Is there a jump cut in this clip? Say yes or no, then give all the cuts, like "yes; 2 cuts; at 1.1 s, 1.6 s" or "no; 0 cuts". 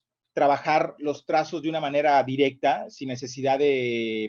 no; 0 cuts